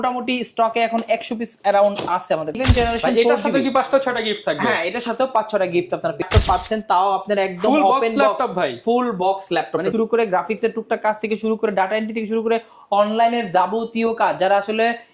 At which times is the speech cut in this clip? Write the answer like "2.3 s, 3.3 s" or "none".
2.5 s, 6.2 s, 9.9 s